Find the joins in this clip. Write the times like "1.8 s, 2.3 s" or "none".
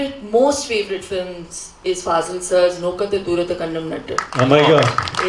none